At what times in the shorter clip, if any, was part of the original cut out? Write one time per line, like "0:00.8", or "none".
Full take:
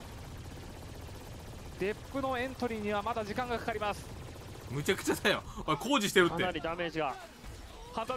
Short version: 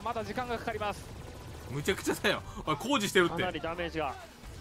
none

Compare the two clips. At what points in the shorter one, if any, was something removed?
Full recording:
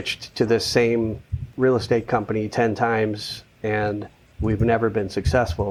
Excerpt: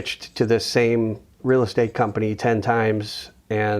0:01.3

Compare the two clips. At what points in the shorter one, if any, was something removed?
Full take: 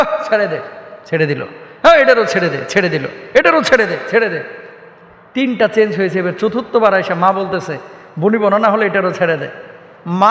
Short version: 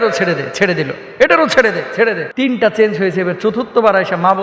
0:02.3

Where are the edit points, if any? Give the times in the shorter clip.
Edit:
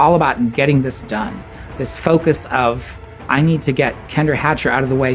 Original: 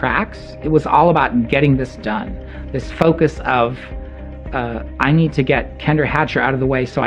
0:03.1

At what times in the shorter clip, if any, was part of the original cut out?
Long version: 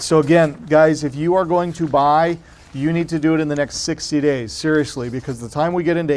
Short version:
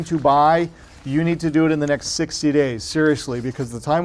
none

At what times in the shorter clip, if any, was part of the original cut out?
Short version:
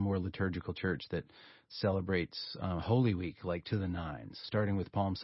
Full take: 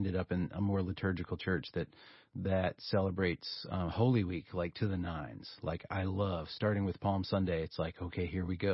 0:01.7
0:04.4

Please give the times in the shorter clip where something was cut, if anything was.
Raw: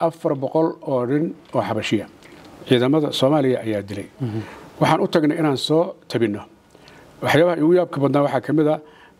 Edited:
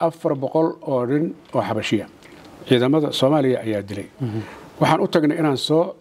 none

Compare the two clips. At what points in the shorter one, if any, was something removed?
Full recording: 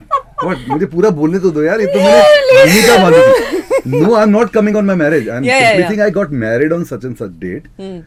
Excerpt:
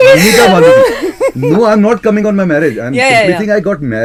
none

